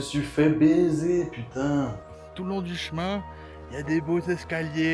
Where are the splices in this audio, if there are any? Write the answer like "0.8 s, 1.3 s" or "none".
2.0 s

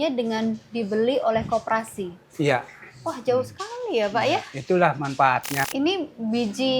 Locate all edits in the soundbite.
5.7 s

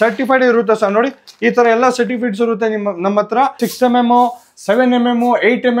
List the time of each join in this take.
3.6 s

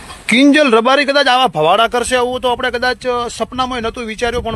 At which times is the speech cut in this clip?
none

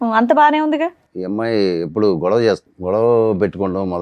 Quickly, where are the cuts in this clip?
1.1 s, 2.7 s

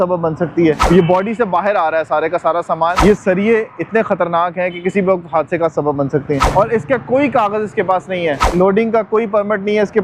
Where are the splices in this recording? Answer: 0.8 s, 3.0 s, 6.4 s, 8.4 s

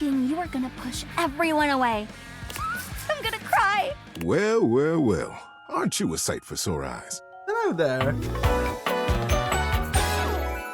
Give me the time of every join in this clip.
4.1 s

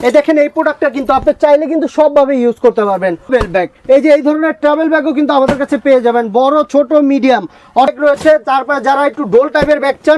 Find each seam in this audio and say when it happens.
3.3 s, 7.9 s

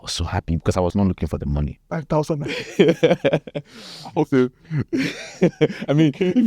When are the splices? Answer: 0.9 s, 2.0 s

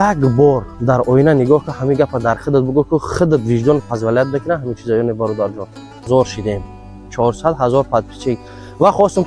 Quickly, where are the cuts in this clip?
6.1 s

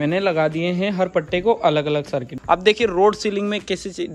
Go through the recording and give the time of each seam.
2.3 s

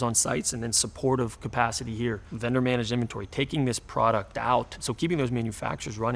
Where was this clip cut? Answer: 2.3 s, 4.8 s

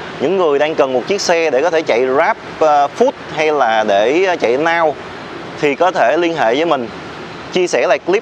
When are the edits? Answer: none

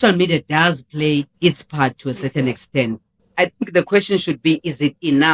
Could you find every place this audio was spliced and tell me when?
3.2 s

